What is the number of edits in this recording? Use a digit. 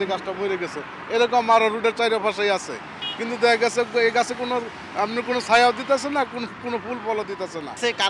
0